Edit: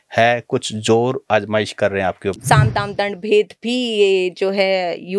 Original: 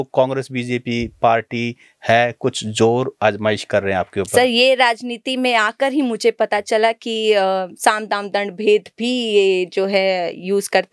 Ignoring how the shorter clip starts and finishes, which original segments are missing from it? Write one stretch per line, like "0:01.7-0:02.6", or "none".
0:04.3-0:07.7